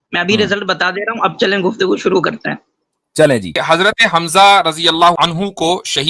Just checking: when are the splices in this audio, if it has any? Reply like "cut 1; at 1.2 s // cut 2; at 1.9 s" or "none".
cut 1; at 3.6 s // cut 2; at 5.1 s